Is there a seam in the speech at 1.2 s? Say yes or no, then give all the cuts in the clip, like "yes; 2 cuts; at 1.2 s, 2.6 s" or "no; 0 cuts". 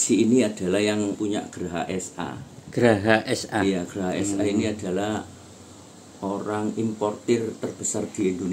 yes; 1 cut; at 1.2 s